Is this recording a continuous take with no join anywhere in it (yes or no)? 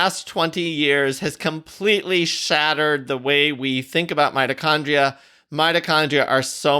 yes